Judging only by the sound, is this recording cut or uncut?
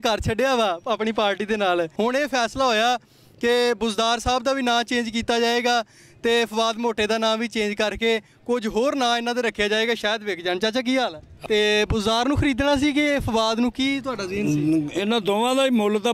cut